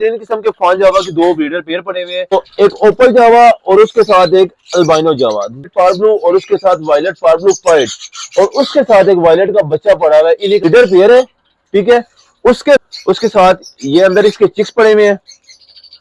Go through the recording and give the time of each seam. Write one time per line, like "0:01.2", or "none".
0:02.3
0:05.6
0:10.6
0:12.8